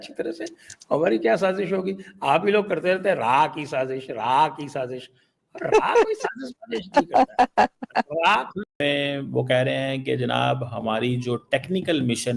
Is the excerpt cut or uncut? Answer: cut